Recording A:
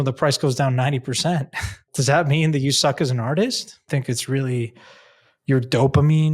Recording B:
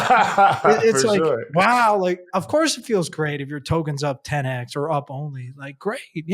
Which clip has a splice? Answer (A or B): A